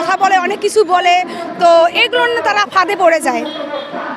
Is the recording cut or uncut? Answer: uncut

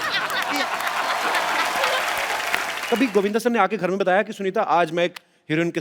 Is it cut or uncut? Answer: cut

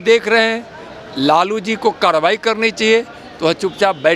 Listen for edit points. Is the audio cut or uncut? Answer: uncut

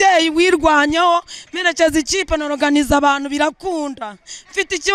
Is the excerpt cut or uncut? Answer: uncut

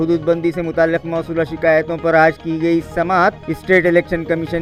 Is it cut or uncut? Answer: uncut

